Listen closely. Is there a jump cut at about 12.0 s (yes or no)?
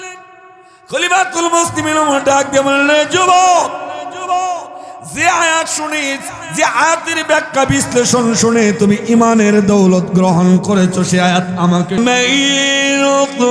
yes